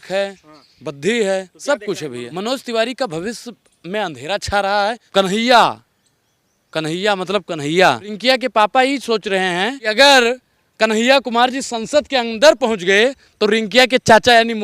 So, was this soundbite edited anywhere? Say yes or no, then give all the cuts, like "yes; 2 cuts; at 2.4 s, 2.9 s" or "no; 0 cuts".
yes; 4 cuts; at 2.3 s, 5.0 s, 8.1 s, 9.8 s